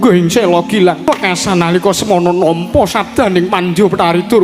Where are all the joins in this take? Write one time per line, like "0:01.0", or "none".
0:01.1